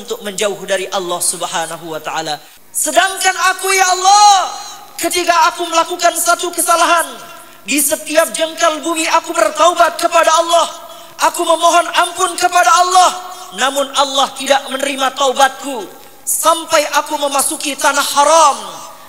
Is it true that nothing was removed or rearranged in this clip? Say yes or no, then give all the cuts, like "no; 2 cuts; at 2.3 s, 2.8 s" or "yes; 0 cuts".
no; 1 cut; at 2.6 s